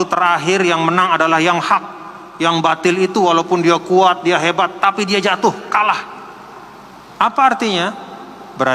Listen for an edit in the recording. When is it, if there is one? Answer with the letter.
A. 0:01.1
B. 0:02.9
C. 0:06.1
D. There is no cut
D